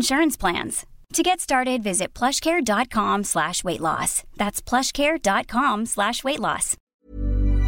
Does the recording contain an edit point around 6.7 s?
yes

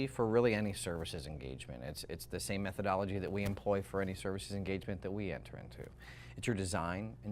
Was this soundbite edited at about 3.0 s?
yes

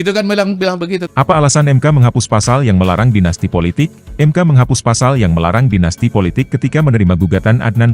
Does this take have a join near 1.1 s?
yes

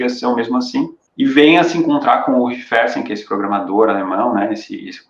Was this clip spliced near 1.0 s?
yes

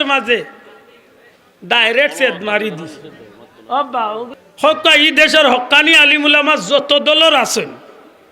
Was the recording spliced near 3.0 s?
no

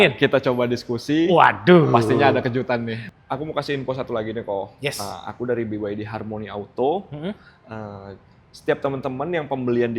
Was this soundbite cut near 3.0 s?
yes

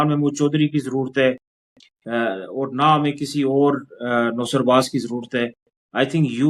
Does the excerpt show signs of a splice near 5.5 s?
no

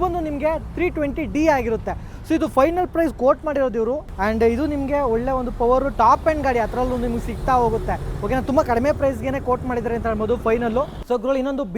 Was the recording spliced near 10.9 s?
yes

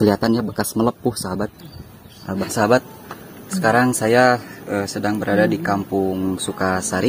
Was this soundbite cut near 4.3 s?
no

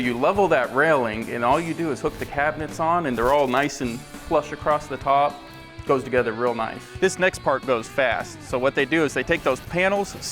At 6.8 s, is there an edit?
yes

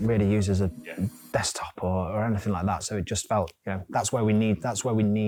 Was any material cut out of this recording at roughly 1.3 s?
no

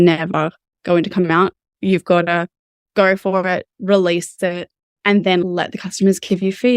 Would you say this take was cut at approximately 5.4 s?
yes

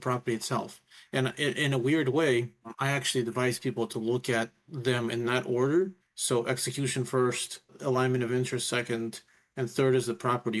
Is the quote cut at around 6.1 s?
yes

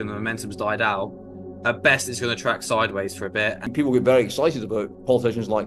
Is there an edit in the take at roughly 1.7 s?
no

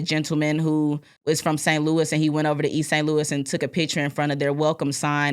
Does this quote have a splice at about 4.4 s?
no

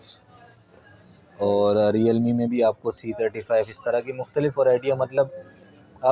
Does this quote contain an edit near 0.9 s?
no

